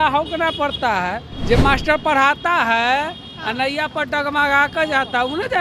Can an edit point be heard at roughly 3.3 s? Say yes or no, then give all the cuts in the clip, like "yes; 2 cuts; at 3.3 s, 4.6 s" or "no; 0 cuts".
no; 1 cut; at 1.3 s